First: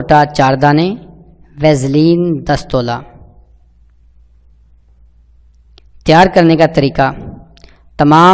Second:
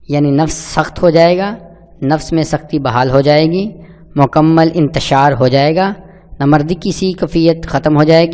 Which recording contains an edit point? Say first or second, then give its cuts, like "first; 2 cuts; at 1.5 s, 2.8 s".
second; 1 cut; at 3.7 s